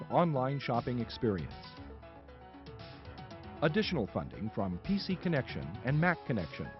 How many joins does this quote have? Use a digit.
2